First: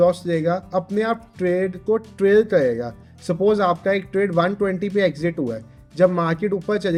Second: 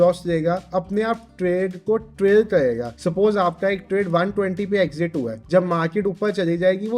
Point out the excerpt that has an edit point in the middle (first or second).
second